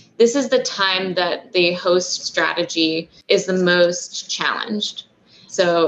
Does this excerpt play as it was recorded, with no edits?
no; 1 cut; at 2.2 s

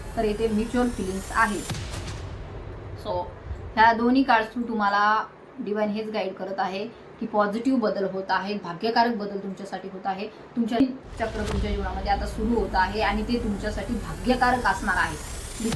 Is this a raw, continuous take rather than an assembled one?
no; 1 cut; at 10.8 s

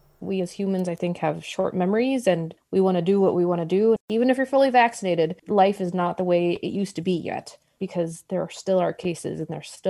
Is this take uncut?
no; 1 cut; at 4.0 s

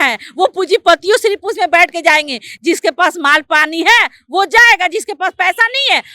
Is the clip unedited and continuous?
yes; 0 cuts

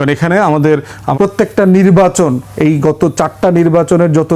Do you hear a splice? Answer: yes; 1 cut; at 1.0 s

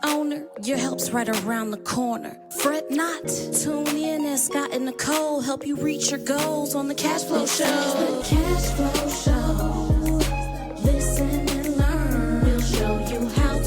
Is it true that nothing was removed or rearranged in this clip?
no; 1 cut; at 8.2 s

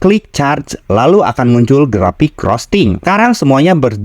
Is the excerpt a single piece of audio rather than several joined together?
no; 1 cut; at 3.0 s

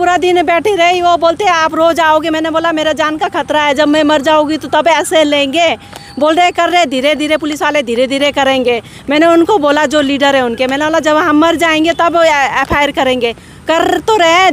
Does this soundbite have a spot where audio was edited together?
no; 0 cuts

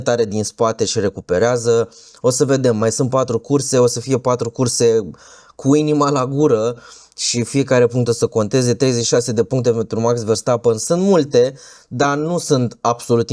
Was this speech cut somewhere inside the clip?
no; 0 cuts

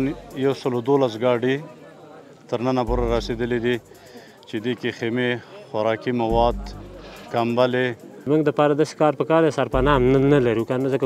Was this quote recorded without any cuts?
no; 1 cut; at 8.2 s

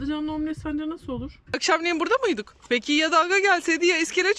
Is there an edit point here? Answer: yes; 2 cuts; at 1.6 s, 2.5 s

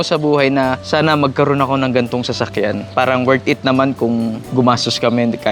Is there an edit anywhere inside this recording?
yes; 3 cuts; at 0.8 s, 2.9 s, 4.4 s

